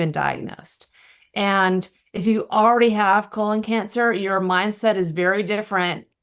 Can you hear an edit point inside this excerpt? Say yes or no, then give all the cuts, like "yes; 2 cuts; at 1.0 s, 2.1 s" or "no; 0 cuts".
no; 0 cuts